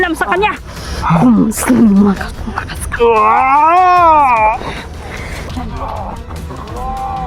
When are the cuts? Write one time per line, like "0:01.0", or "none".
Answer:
0:05.5